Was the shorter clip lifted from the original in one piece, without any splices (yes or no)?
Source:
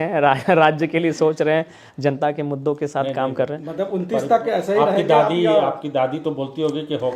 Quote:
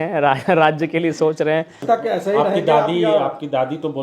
no